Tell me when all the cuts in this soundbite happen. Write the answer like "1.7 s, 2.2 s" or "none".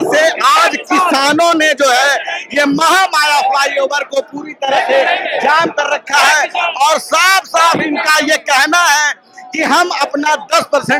none